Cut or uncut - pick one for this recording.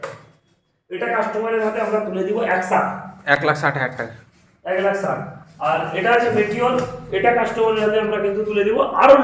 uncut